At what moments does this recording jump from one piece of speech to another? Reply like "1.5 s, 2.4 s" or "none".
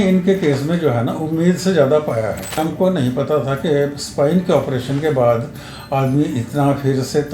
2.6 s